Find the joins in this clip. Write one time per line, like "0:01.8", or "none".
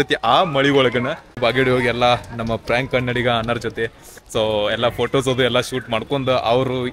0:01.4